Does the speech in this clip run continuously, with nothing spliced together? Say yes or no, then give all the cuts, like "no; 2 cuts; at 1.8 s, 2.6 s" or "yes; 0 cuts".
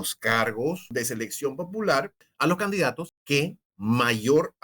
no; 3 cuts; at 0.9 s, 2.2 s, 3.5 s